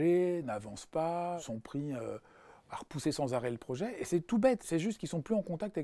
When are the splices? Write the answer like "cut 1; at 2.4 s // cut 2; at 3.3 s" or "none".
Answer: cut 1; at 1.4 s // cut 2; at 4.6 s